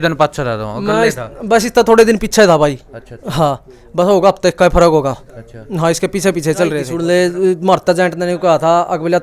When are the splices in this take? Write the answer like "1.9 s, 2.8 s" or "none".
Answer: 6.9 s